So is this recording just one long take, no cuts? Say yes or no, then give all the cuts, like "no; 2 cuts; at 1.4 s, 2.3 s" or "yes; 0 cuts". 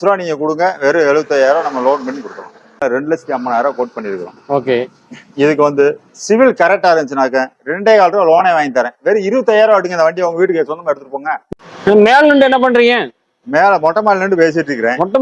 no; 2 cuts; at 2.8 s, 11.4 s